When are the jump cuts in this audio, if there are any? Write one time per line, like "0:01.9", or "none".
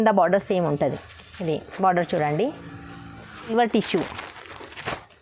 0:03.5